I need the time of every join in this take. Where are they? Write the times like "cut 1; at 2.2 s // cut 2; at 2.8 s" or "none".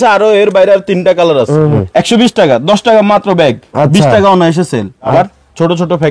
cut 1; at 1.8 s // cut 2; at 5.1 s